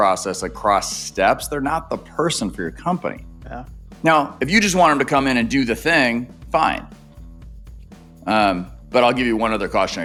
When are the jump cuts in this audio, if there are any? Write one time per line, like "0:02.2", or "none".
none